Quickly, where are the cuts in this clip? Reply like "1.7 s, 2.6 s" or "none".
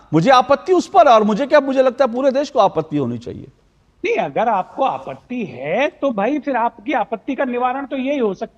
none